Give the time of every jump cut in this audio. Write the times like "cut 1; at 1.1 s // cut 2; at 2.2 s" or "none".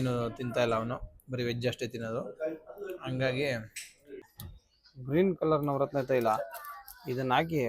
cut 1; at 4.3 s